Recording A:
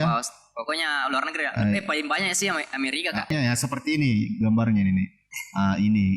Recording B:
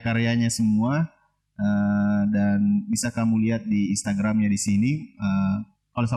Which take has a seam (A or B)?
A